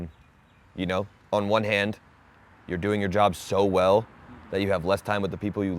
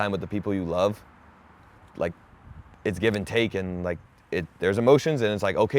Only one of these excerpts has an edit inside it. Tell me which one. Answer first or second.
second